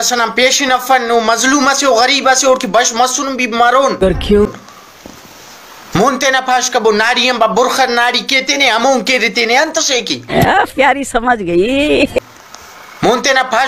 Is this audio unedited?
yes; 0 cuts

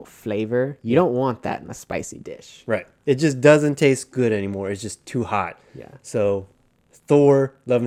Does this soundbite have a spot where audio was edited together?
no; 0 cuts

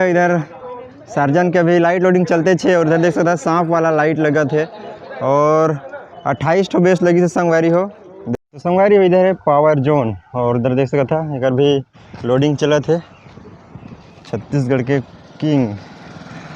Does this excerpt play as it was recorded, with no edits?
no; 1 cut; at 8.2 s

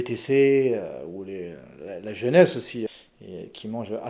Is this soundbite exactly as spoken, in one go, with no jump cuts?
no; 1 cut; at 2.9 s

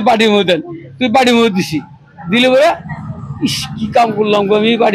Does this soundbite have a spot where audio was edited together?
no; 0 cuts

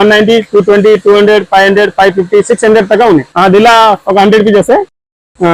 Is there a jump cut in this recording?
yes; 1 cut; at 3.3 s

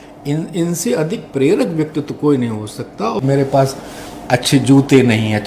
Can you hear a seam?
yes; 1 cut; at 3.2 s

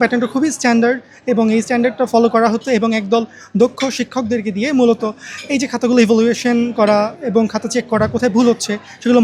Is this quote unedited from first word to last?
yes; 0 cuts

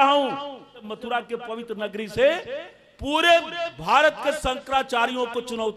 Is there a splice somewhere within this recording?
yes; 1 cut; at 0.9 s

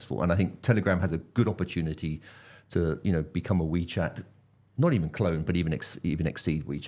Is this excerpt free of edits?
yes; 0 cuts

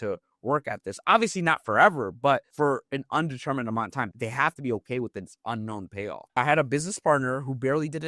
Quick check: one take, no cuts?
no; 1 cut; at 6.2 s

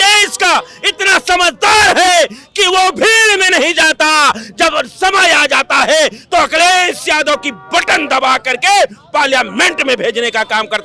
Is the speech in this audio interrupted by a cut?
no; 0 cuts

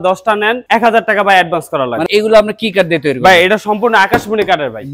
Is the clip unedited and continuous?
no; 1 cut; at 2.0 s

